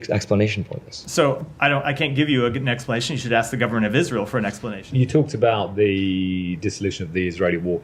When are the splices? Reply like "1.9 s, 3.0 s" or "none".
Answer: 4.7 s